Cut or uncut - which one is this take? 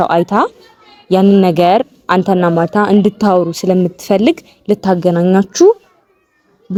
uncut